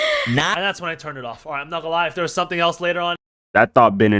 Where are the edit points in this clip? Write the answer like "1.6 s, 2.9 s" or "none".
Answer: 3.2 s

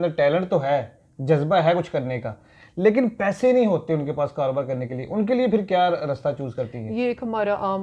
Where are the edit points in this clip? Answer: none

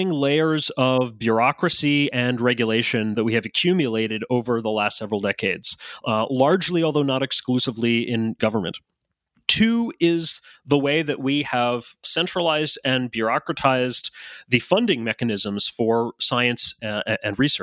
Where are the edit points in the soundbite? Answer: 3.1 s, 8.4 s, 12.0 s

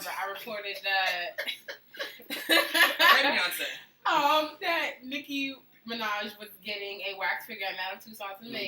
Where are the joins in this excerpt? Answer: 4.9 s

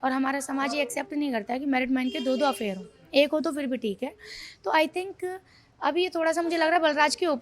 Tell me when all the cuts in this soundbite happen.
none

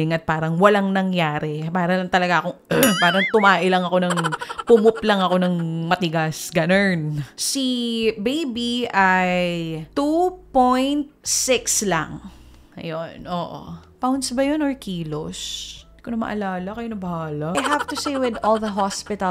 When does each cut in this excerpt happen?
7.2 s, 17.6 s

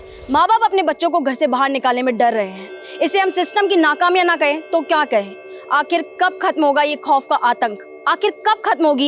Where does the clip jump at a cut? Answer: none

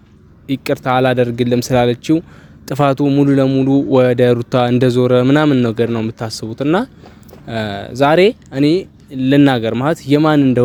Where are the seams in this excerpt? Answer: none

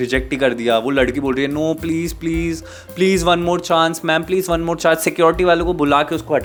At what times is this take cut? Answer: none

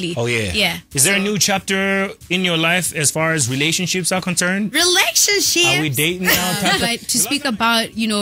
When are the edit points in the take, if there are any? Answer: 7.0 s

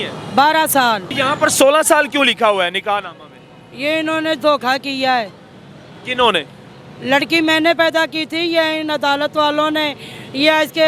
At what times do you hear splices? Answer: 1.1 s

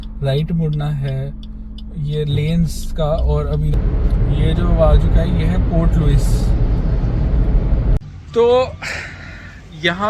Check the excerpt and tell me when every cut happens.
3.7 s, 8.0 s

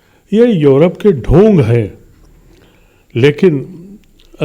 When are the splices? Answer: none

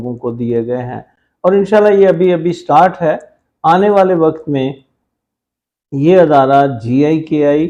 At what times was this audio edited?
none

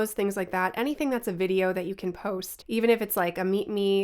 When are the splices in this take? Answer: 2.5 s

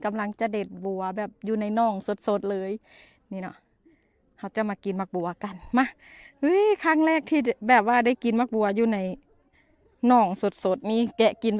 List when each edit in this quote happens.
none

